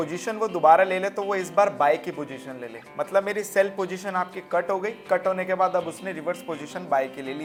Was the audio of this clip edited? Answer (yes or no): no